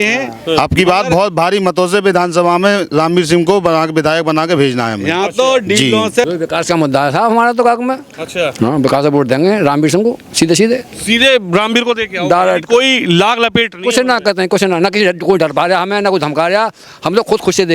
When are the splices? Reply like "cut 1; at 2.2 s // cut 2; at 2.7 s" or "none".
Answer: cut 1; at 6.2 s